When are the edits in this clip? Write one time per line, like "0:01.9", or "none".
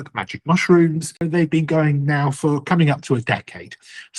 0:01.3